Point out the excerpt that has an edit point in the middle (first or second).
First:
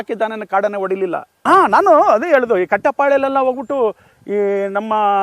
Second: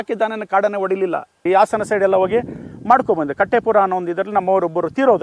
second